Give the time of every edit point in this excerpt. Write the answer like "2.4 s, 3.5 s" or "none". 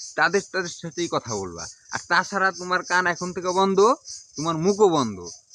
none